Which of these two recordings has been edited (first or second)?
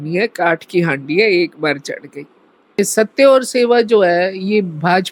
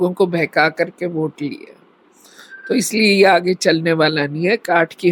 first